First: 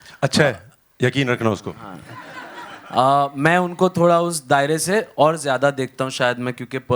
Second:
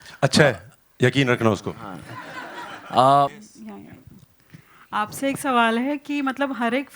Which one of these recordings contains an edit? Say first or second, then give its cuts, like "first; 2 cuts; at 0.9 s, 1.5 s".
second; 1 cut; at 3.3 s